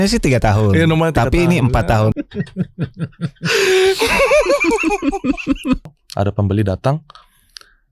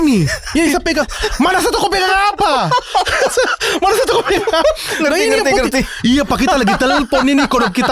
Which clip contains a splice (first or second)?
first